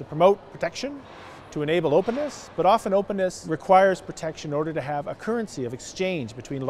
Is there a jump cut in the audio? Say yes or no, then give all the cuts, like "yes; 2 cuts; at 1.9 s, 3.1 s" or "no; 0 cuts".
yes; 1 cut; at 3.5 s